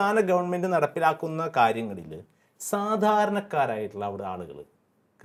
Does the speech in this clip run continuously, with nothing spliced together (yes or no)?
yes